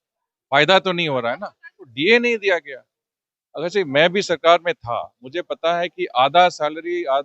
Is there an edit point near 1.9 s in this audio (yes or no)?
yes